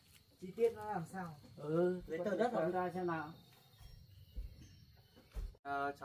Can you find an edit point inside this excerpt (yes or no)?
no